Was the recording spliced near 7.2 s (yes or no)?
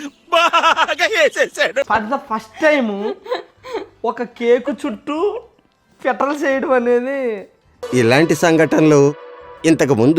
no